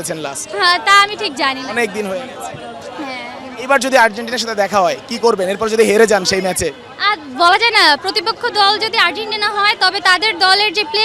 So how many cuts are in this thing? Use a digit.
0